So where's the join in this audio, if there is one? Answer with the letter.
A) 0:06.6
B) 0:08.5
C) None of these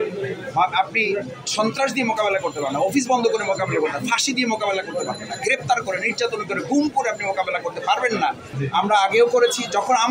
B